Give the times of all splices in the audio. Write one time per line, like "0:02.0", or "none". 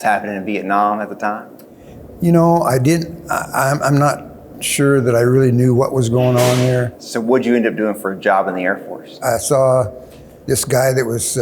0:07.0
0:09.2